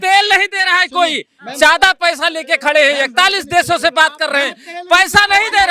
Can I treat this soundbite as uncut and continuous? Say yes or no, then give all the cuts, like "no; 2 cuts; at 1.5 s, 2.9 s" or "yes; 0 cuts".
yes; 0 cuts